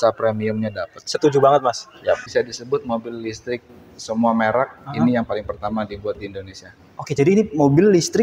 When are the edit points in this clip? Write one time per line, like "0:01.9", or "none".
0:02.3